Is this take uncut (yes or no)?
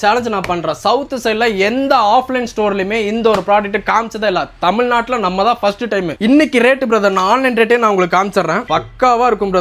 yes